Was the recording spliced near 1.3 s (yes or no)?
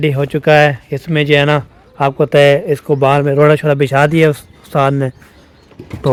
no